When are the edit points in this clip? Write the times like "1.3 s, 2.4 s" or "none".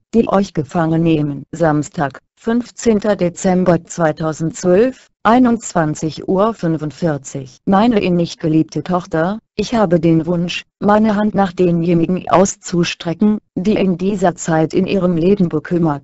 1.4 s